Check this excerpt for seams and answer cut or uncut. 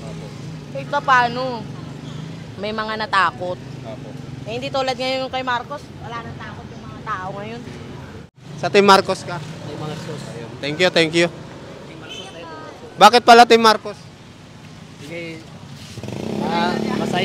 cut